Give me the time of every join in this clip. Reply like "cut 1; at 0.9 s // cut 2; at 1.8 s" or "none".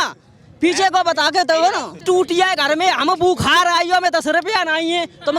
cut 1; at 2.0 s